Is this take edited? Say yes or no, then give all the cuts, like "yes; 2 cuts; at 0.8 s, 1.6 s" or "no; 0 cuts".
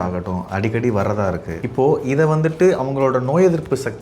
yes; 1 cut; at 1.5 s